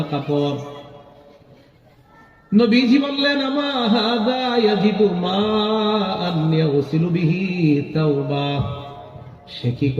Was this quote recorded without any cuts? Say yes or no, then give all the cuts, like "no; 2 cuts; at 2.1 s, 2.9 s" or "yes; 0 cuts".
yes; 0 cuts